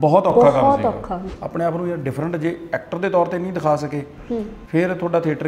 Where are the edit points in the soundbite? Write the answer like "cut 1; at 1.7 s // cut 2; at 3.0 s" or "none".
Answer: cut 1; at 1.2 s